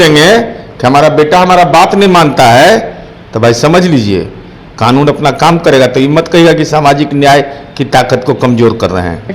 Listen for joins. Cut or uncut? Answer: uncut